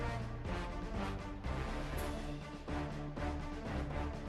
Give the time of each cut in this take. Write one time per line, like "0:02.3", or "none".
none